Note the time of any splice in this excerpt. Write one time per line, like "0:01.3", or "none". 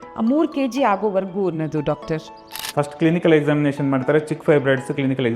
0:02.5